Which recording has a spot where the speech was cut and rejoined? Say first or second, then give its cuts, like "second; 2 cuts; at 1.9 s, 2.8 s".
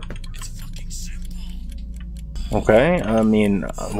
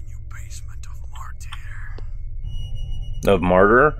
first; 1 cut; at 2.3 s